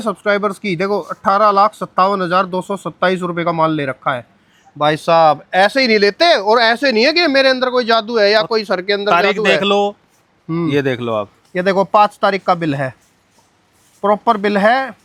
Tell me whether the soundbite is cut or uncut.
uncut